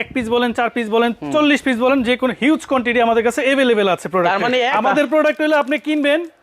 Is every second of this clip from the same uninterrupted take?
no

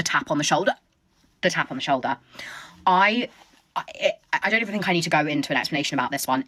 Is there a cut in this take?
no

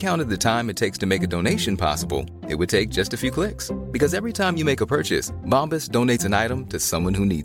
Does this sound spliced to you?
no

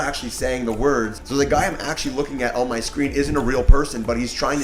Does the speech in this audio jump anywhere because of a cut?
yes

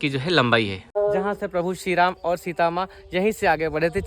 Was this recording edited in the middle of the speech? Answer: yes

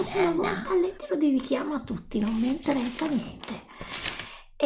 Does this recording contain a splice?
no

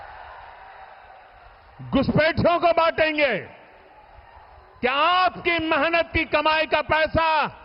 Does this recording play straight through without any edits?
yes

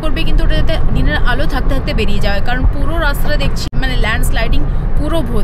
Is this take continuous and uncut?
no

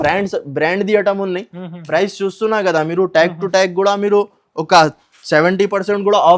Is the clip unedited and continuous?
yes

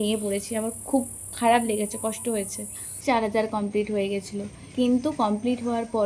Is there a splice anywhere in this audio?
yes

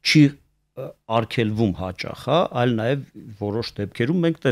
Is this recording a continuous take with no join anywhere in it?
yes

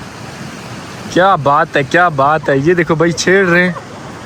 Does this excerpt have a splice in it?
no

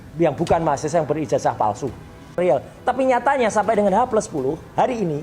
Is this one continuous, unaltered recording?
no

